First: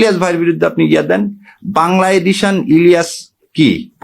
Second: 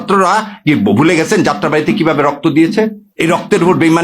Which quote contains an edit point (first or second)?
second